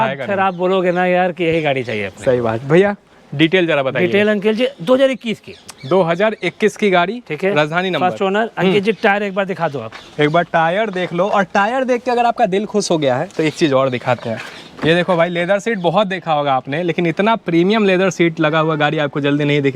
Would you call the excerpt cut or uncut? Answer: uncut